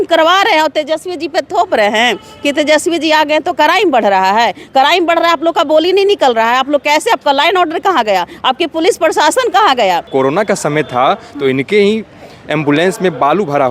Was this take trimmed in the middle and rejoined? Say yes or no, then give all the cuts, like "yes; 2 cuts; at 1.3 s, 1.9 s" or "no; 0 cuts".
yes; 1 cut; at 10.1 s